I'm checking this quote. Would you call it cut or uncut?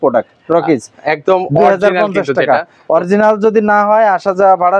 uncut